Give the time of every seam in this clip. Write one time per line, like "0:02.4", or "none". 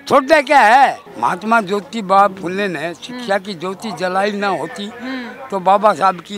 0:01.1